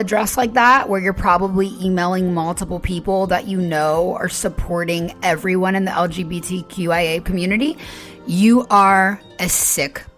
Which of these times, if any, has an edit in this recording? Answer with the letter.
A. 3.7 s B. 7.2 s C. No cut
B